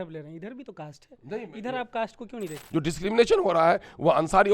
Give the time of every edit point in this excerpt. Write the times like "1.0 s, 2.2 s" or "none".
2.6 s